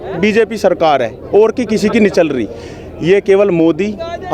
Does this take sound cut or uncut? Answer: uncut